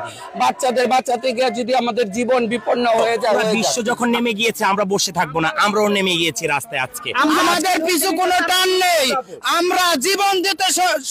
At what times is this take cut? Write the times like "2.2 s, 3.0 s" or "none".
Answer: 3.7 s, 7.4 s